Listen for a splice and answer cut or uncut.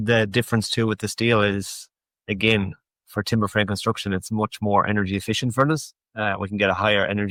uncut